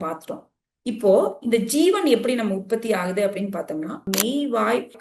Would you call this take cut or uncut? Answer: cut